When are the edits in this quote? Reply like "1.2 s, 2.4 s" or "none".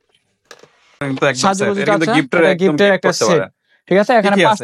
1.0 s